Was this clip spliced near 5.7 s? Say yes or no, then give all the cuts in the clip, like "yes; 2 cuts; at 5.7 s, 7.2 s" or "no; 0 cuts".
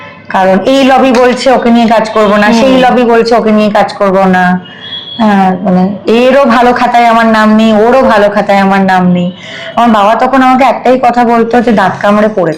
no; 0 cuts